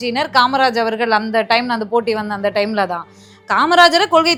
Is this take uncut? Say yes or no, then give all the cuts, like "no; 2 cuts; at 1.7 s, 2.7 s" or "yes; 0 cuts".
yes; 0 cuts